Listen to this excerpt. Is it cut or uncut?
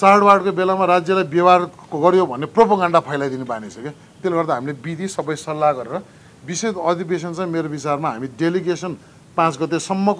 uncut